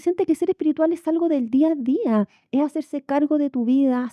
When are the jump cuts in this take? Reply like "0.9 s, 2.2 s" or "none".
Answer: none